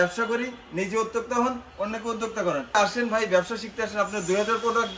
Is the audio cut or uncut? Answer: cut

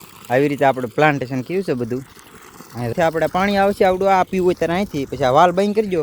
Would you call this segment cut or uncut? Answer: cut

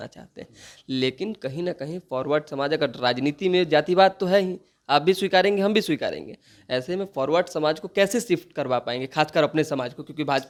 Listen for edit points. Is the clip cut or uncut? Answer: uncut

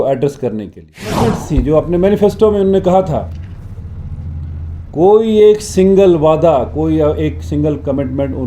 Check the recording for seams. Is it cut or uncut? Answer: cut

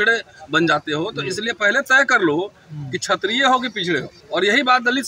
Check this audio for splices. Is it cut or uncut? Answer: cut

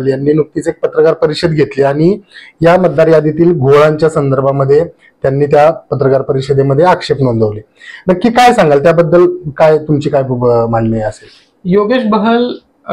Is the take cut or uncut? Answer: uncut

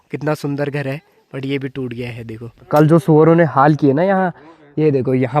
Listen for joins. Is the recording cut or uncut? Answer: cut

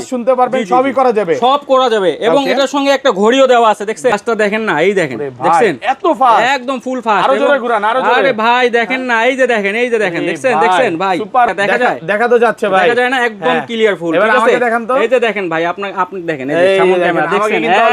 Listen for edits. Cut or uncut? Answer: cut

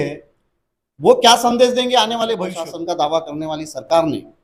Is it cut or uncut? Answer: cut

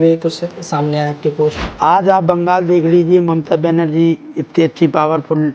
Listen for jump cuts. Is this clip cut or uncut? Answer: cut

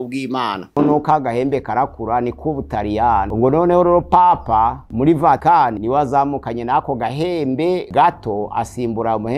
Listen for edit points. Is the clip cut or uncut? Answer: cut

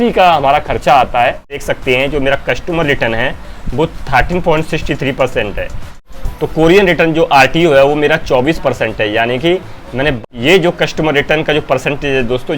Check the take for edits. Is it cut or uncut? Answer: cut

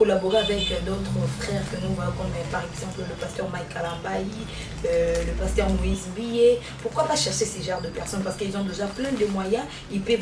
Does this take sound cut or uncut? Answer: uncut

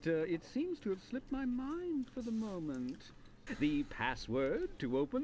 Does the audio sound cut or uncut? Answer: cut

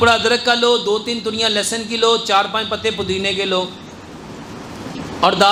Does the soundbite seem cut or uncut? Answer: uncut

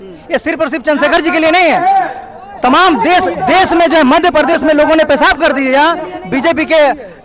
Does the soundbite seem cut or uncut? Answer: uncut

